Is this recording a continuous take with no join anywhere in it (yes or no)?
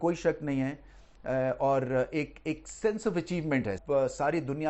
no